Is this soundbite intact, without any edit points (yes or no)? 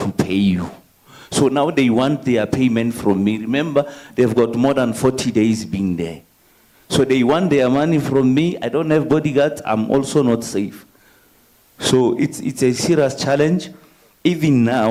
yes